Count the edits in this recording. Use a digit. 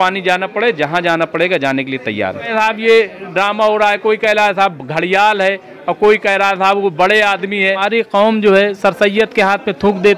2